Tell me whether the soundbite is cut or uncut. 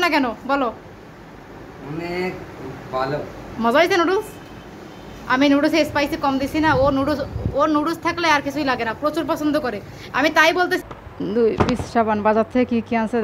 cut